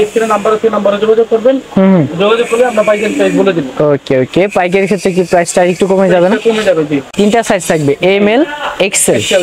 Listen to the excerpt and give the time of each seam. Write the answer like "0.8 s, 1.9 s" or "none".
7.1 s